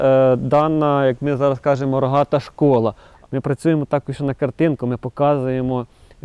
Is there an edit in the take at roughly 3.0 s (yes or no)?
yes